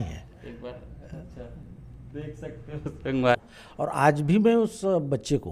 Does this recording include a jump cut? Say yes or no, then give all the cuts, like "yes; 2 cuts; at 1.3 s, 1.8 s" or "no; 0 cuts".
yes; 1 cut; at 3.3 s